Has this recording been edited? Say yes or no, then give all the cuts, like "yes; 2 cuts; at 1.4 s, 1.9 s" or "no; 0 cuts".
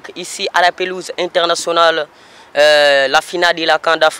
no; 0 cuts